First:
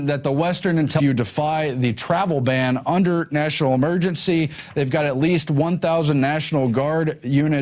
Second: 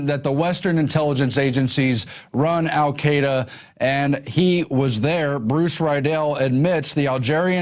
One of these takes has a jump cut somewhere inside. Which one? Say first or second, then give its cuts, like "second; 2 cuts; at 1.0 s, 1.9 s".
second; 1 cut; at 1.0 s